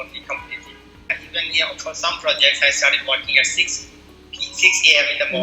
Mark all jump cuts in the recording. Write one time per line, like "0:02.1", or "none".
0:01.1